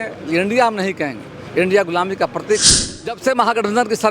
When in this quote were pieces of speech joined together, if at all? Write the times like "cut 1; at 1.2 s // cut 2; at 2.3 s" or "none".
cut 1; at 2.8 s